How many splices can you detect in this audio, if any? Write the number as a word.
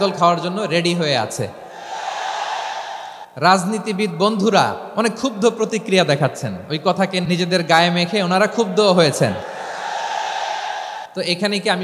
four